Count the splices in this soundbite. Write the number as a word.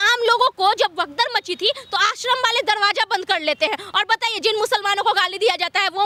zero